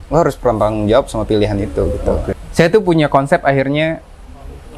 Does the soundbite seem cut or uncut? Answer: cut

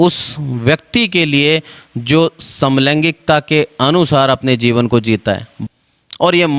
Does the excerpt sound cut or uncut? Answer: cut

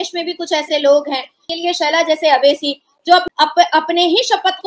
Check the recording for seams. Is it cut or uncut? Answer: cut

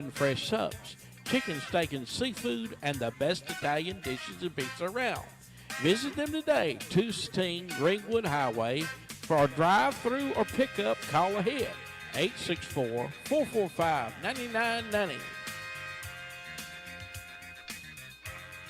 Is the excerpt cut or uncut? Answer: cut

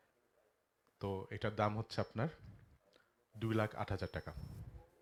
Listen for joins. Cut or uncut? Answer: uncut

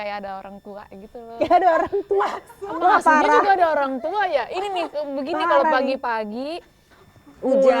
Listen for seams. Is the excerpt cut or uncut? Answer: cut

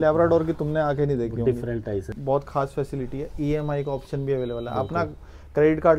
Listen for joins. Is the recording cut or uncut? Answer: cut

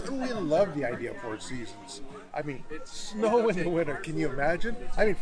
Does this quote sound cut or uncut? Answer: uncut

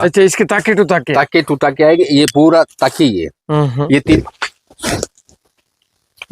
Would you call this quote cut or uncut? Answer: cut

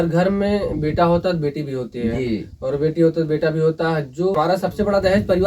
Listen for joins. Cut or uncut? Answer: cut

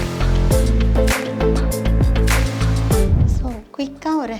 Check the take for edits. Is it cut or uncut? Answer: cut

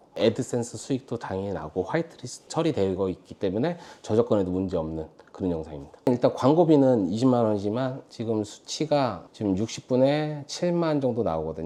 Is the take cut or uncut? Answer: uncut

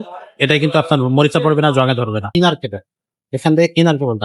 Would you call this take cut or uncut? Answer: cut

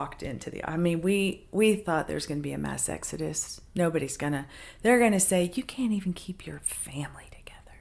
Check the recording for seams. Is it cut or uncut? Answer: uncut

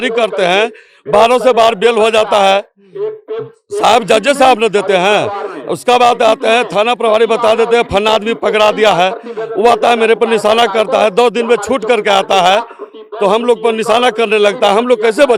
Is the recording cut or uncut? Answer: uncut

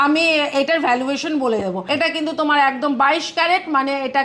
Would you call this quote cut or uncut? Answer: cut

